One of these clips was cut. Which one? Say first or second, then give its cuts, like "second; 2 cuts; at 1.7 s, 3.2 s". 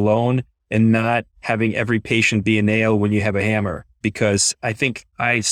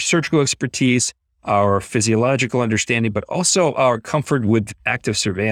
first; 1 cut; at 3.9 s